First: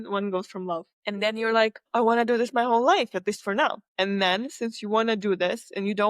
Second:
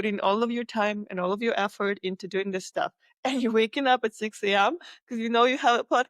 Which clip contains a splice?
first; 3 cuts; at 0.9 s, 1.8 s, 3.8 s

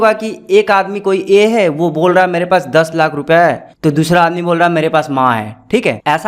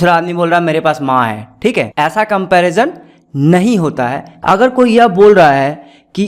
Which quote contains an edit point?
second; 1 cut; at 4.3 s

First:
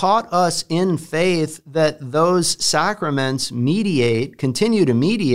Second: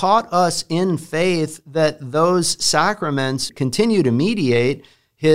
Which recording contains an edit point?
second; 1 cut; at 3.5 s

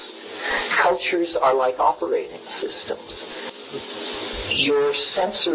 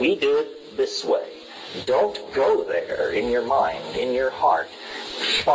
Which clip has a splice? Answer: first; 1 cut; at 3.5 s

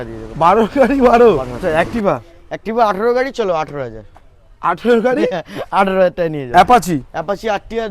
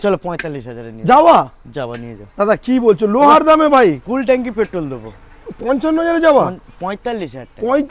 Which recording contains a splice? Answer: first; 2 cuts; at 1.5 s, 6.4 s

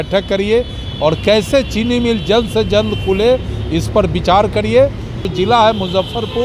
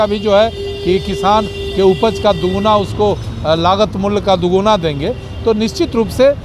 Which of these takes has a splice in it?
first; 1 cut; at 5.2 s

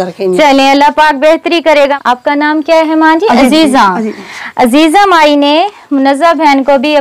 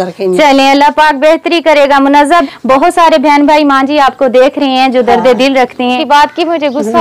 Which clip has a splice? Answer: second; 2 cuts; at 2.2 s, 6.0 s

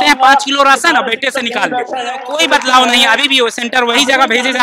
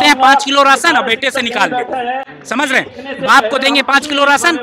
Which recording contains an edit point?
first; 1 cut; at 2.2 s

